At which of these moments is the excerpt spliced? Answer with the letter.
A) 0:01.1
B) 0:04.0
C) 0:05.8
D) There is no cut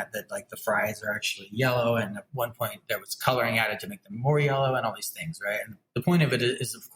C